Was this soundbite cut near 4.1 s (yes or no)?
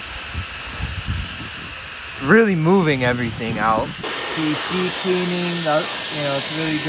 yes